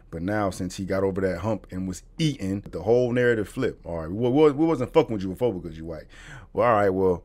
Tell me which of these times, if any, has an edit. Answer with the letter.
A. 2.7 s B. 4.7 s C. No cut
A